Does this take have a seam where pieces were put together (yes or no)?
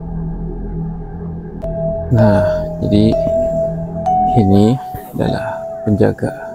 yes